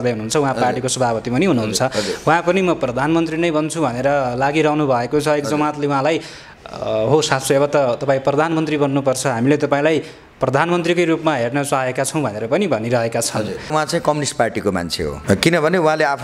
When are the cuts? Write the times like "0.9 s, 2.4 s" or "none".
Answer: 13.7 s, 15.2 s